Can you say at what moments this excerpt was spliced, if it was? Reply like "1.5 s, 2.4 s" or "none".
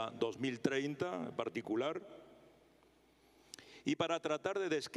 none